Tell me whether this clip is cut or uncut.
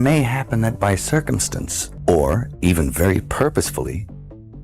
cut